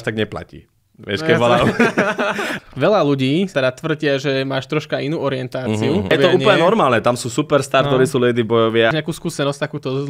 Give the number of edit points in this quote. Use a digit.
3